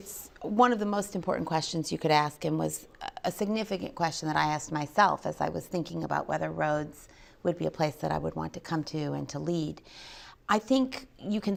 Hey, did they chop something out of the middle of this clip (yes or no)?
no